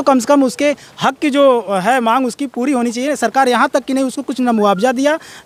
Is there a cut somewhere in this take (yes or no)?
no